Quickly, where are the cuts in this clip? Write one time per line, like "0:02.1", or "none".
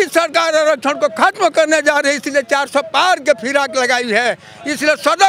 none